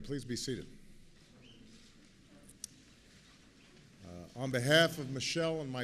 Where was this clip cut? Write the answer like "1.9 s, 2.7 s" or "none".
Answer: 2.8 s